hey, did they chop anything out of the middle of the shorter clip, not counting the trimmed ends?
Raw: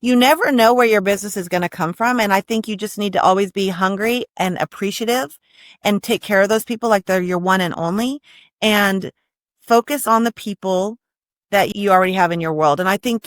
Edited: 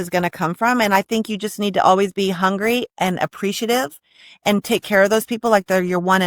no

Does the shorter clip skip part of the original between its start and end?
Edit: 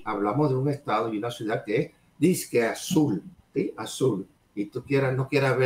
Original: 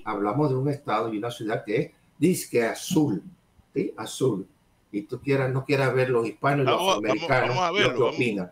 yes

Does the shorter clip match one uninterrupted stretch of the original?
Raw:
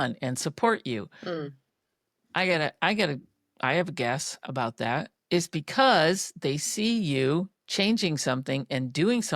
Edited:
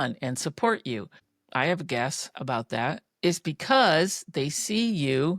no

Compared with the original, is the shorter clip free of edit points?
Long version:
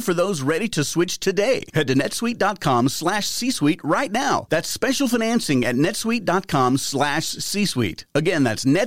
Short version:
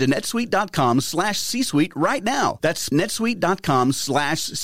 no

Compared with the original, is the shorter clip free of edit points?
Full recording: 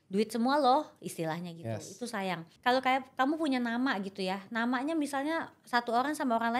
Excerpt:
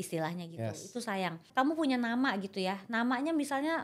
no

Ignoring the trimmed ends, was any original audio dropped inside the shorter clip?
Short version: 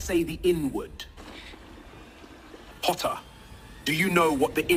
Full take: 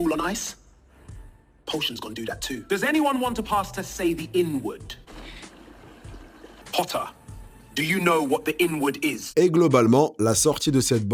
no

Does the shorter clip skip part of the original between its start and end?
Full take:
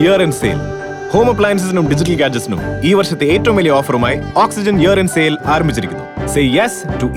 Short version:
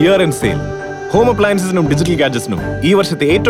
no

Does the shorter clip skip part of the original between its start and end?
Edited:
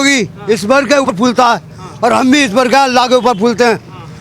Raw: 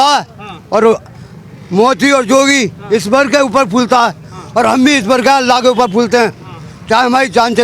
yes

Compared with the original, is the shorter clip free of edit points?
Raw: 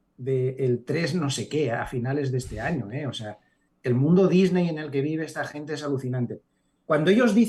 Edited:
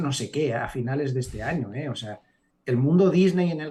yes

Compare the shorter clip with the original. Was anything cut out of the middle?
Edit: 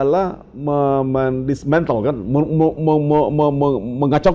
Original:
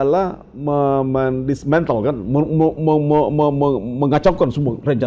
no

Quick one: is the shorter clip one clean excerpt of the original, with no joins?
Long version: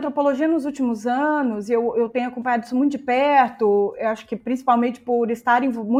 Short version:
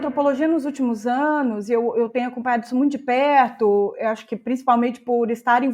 yes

